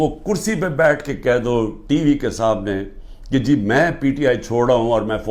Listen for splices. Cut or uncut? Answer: uncut